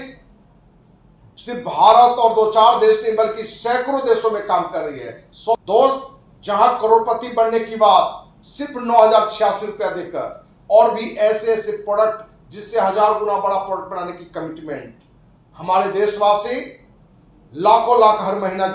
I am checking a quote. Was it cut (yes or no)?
yes